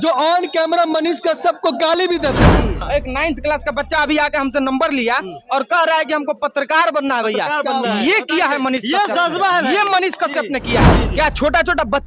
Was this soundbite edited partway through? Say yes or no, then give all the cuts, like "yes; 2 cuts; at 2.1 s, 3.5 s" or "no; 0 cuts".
yes; 1 cut; at 2.8 s